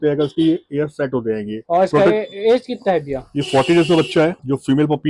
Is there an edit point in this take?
no; 0 cuts

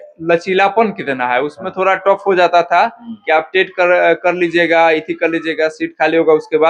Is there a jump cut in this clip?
no; 0 cuts

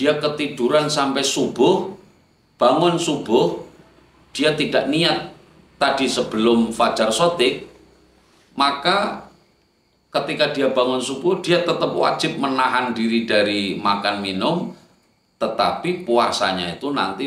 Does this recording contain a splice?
no; 0 cuts

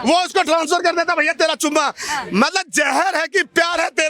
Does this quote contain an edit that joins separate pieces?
no; 0 cuts

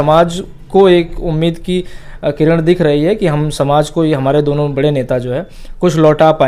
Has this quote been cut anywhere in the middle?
no; 0 cuts

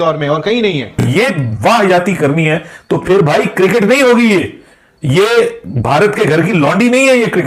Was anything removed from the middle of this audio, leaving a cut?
yes; 1 cut; at 1.0 s

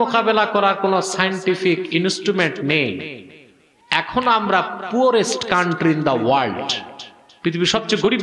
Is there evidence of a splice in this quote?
no; 0 cuts

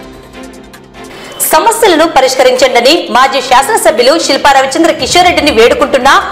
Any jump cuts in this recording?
yes; 1 cut; at 1.0 s

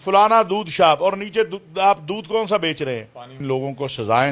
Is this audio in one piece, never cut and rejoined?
no; 1 cut; at 3.3 s

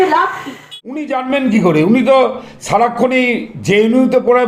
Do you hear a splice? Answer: yes; 1 cut; at 1.0 s

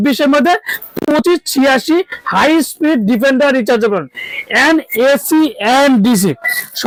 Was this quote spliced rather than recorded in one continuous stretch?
no; 0 cuts

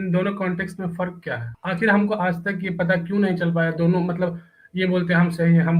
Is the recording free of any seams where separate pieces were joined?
no; 1 cut; at 1.5 s

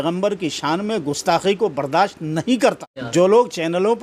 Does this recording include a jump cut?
yes; 1 cut; at 2.9 s

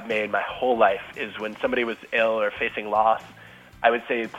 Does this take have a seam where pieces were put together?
no; 0 cuts

